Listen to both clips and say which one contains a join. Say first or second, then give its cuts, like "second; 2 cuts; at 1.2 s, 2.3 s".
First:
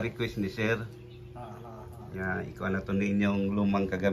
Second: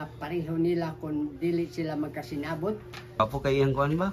second; 1 cut; at 3.2 s